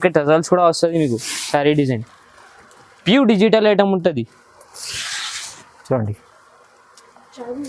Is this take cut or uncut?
uncut